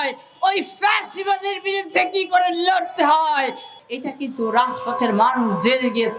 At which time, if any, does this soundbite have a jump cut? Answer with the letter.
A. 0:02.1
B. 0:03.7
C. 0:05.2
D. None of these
B